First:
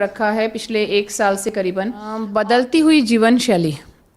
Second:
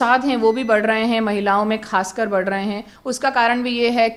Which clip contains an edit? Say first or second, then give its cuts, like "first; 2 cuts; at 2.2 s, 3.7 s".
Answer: first; 1 cut; at 1.5 s